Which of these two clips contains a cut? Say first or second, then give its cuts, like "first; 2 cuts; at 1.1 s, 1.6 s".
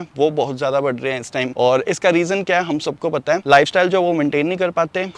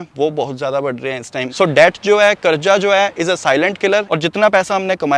second; 2 cuts; at 1.5 s, 4.1 s